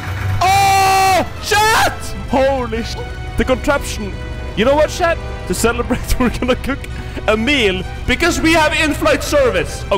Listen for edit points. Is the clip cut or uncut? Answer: cut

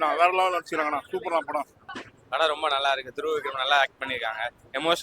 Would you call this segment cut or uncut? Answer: cut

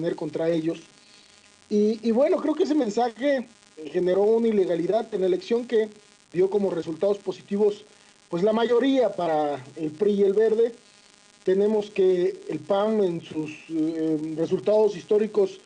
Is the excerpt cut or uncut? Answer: cut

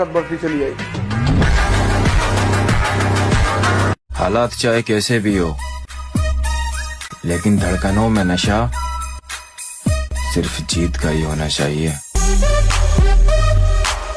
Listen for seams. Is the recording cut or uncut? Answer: uncut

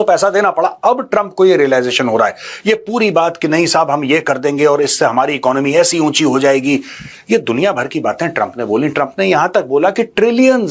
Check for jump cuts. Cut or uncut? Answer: uncut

